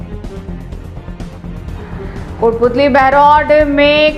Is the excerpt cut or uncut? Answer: uncut